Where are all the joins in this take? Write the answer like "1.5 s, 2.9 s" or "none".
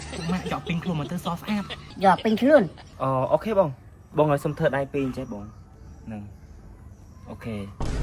1.8 s